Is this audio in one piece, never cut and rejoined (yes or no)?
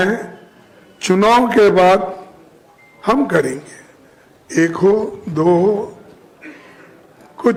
yes